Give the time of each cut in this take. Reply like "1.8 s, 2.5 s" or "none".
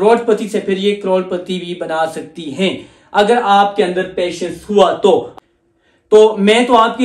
5.3 s